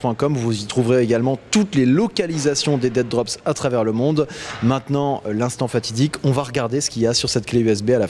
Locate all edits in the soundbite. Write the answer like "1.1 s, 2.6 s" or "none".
5.8 s